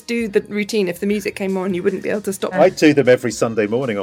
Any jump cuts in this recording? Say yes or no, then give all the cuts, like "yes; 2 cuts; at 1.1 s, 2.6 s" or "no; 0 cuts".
yes; 1 cut; at 2.5 s